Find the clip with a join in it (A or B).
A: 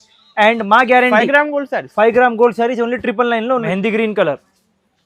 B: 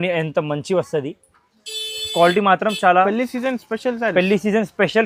A